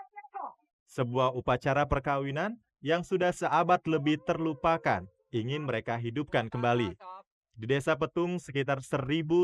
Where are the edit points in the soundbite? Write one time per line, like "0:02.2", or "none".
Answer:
none